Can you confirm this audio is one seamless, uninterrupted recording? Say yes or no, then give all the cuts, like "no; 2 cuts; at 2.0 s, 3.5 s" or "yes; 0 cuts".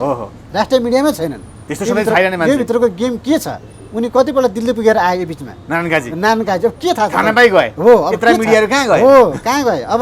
yes; 0 cuts